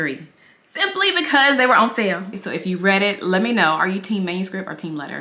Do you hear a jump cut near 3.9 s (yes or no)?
no